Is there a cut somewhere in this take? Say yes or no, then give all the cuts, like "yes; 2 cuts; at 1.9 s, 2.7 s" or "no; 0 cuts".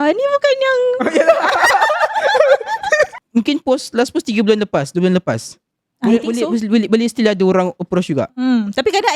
yes; 1 cut; at 3.1 s